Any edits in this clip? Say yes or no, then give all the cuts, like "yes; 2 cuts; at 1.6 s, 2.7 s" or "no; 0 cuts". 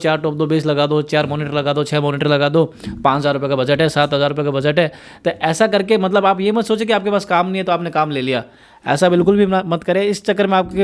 no; 0 cuts